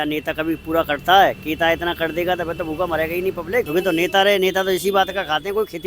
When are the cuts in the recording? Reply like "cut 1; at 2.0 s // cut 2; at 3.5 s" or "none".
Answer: cut 1; at 3.7 s